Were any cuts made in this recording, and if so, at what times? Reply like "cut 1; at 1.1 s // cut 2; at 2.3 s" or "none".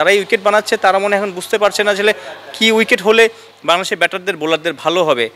none